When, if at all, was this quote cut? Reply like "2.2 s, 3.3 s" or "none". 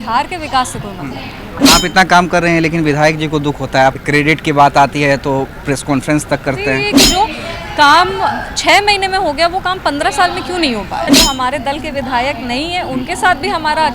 1.6 s, 4.0 s, 7.0 s, 11.1 s